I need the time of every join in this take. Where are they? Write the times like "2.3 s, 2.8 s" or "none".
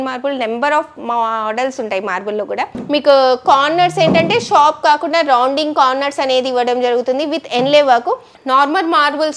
2.8 s, 8.3 s